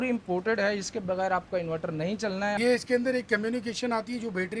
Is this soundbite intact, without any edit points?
no; 1 cut; at 2.6 s

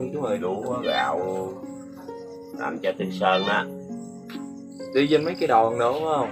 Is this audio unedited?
yes; 0 cuts

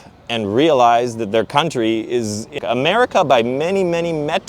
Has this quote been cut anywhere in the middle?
yes; 1 cut; at 2.5 s

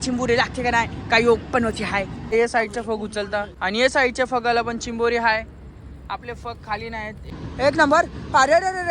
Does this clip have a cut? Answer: yes; 3 cuts; at 2.3 s, 3.5 s, 7.4 s

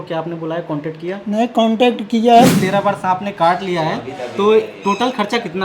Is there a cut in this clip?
yes; 1 cut; at 2.5 s

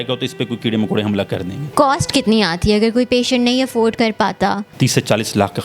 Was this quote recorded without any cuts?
no; 2 cuts; at 1.7 s, 4.7 s

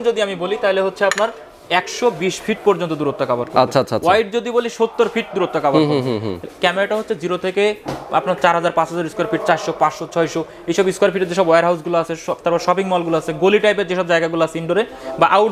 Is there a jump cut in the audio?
no; 0 cuts

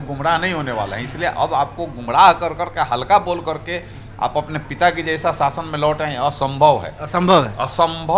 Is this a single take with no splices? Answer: yes; 0 cuts

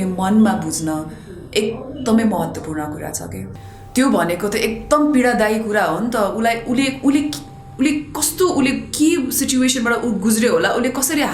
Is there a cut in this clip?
yes; 1 cut; at 3.5 s

